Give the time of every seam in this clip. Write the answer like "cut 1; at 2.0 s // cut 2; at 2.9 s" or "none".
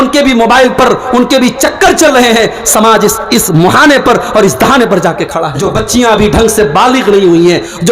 cut 1; at 5.4 s